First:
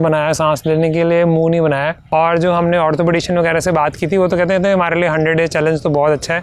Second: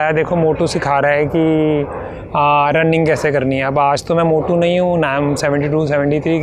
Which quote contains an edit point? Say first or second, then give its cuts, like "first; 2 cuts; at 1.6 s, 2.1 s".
first; 1 cut; at 2.0 s